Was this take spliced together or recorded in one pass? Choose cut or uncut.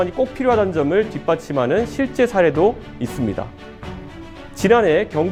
uncut